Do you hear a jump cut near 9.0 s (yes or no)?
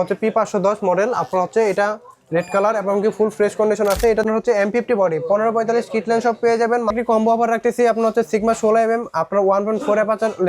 no